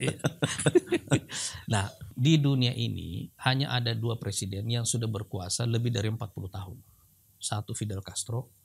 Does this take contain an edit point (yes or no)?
yes